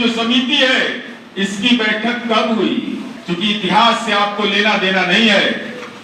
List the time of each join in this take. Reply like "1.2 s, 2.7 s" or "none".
3.1 s